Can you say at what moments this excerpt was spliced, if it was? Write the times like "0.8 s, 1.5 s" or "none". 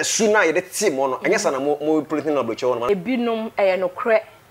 2.9 s